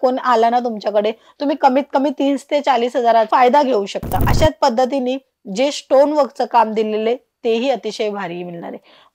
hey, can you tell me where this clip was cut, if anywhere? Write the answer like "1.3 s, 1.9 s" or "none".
3.3 s, 4.3 s